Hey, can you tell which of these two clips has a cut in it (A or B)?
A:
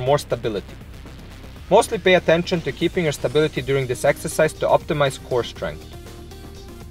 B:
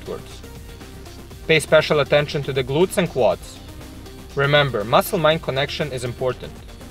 A